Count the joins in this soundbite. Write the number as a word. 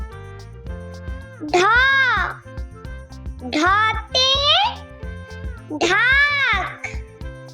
two